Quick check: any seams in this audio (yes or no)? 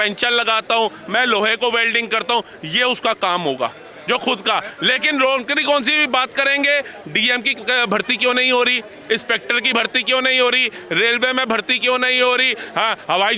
no